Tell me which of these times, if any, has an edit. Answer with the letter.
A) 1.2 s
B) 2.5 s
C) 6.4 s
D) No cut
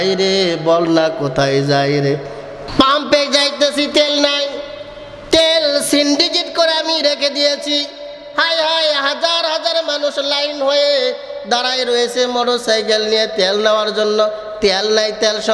B